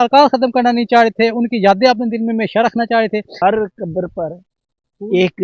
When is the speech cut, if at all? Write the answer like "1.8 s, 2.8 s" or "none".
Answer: 3.3 s